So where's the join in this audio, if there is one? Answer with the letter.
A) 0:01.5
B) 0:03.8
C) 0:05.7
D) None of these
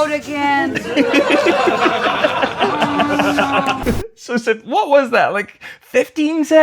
B